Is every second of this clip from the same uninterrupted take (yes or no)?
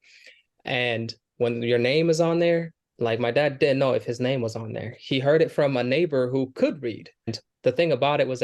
no